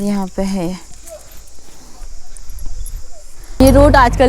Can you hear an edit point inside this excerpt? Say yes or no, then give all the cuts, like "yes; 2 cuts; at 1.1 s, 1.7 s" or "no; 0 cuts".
yes; 1 cut; at 3.4 s